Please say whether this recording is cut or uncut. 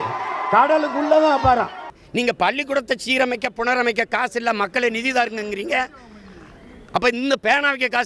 cut